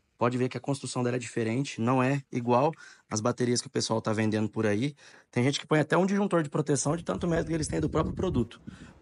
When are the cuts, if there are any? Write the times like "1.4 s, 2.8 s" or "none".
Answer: none